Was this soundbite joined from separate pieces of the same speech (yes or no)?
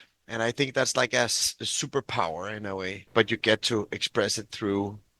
yes